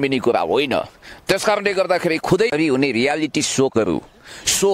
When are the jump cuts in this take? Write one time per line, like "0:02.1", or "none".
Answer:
0:02.5